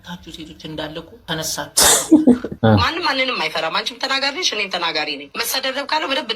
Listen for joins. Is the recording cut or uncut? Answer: cut